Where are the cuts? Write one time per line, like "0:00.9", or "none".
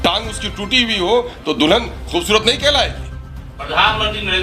none